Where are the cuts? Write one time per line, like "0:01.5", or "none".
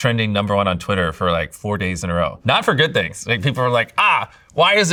none